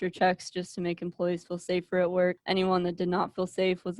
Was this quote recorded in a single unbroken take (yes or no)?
no